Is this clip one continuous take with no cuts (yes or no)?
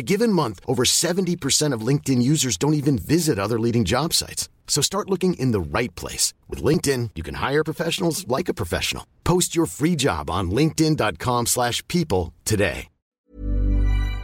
no